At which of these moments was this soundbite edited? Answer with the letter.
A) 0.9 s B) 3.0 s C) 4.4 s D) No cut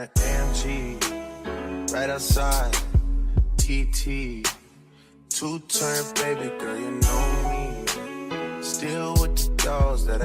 D